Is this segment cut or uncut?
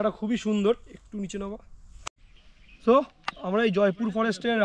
cut